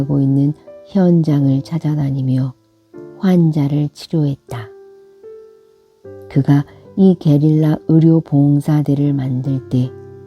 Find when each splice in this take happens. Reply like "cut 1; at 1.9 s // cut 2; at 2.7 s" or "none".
cut 1; at 4.6 s // cut 2; at 6.3 s